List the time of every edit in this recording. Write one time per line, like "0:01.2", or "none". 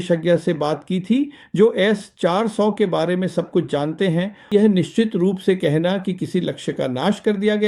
0:04.5